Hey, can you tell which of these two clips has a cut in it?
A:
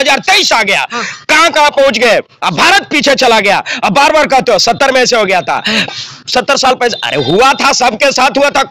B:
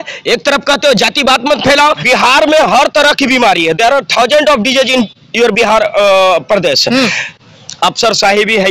B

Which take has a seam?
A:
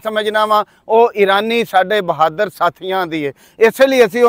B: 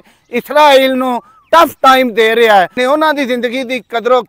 B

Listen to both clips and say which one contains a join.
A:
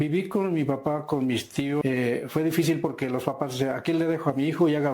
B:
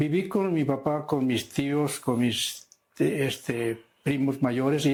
A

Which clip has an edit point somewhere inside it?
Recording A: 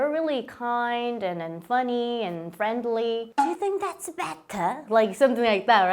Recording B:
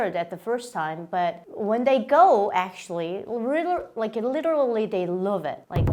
A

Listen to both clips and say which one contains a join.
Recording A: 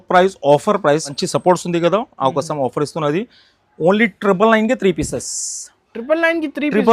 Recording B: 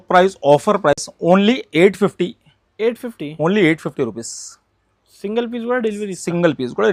A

